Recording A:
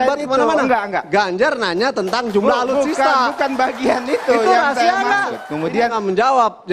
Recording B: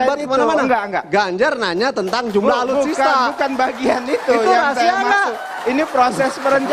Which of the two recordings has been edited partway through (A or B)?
A